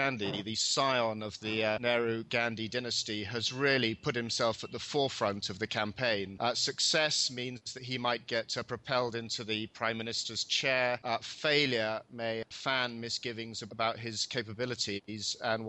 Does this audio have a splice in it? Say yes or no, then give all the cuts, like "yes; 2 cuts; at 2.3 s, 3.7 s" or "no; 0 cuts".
yes; 1 cut; at 13.7 s